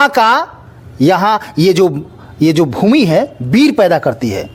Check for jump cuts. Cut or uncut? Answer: uncut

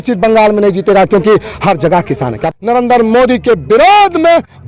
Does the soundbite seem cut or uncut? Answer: cut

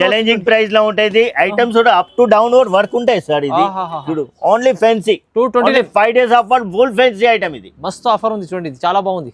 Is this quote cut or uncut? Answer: uncut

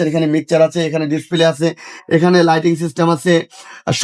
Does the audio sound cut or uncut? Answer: uncut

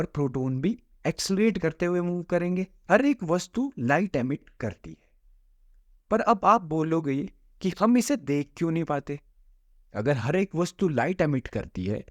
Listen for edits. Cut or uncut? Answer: cut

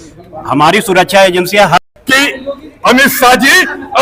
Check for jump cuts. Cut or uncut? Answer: cut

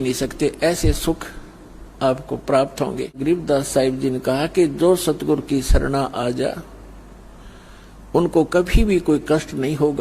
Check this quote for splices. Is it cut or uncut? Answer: cut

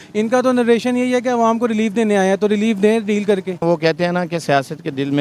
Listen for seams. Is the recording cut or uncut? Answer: cut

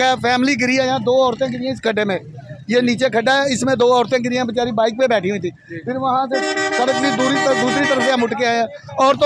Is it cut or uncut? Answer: uncut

